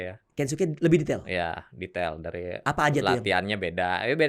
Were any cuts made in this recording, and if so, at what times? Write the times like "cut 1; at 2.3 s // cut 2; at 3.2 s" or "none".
none